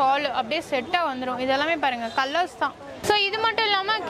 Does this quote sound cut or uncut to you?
cut